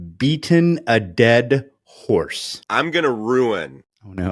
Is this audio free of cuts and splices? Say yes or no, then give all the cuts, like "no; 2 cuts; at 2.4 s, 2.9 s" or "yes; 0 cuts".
yes; 0 cuts